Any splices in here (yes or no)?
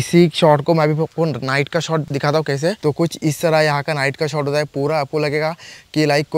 yes